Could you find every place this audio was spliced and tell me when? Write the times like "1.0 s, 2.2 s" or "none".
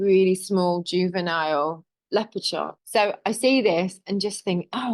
2.8 s